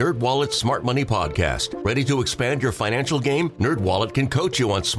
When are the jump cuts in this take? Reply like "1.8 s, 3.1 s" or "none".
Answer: none